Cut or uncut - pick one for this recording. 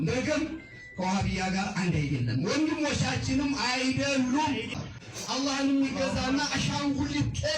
cut